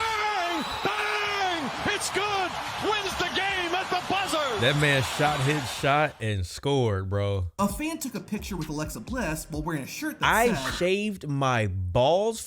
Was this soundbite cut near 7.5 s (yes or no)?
yes